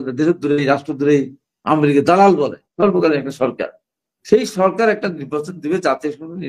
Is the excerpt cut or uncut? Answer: cut